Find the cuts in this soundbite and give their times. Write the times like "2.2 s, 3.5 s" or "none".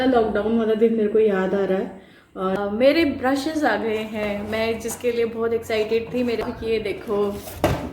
2.6 s, 6.4 s

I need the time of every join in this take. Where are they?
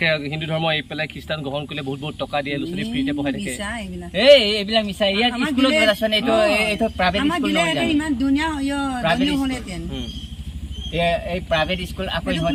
none

